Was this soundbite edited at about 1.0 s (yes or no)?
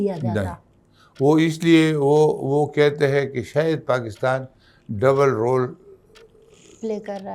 no